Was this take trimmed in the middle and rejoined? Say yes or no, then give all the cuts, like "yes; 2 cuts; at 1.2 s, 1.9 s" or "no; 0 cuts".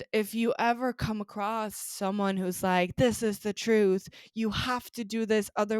no; 0 cuts